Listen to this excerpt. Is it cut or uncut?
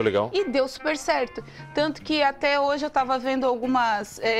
uncut